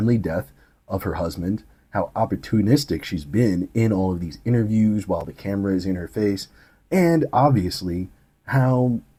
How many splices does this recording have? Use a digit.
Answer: 0